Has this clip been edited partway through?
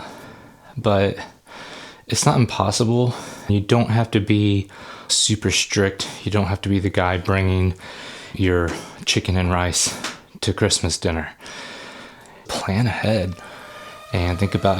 yes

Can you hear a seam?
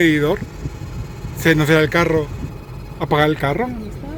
no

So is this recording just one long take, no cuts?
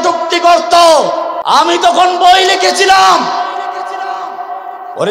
no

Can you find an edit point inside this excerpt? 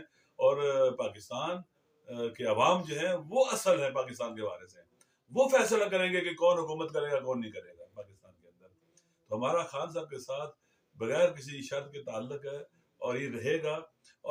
no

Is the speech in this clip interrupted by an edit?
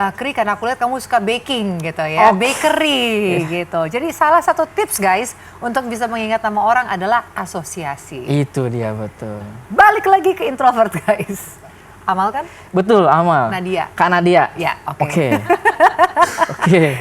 no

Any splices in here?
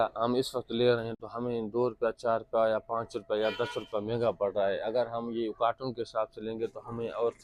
no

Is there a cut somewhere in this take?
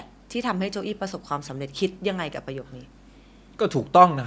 no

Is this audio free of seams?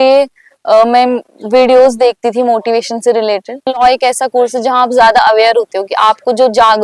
no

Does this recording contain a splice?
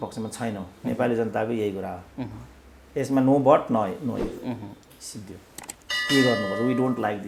no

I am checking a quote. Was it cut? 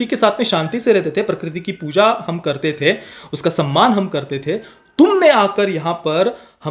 no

